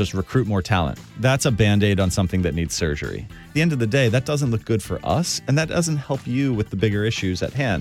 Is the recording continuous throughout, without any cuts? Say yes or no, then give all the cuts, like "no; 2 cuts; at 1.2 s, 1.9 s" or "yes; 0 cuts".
no; 2 cuts; at 1.2 s, 3.5 s